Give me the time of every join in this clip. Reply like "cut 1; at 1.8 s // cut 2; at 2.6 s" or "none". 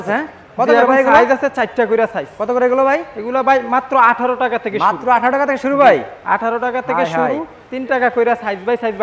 none